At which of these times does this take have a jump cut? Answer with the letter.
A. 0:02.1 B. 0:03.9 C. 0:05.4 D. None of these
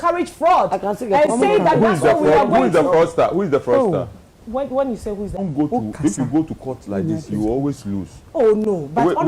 C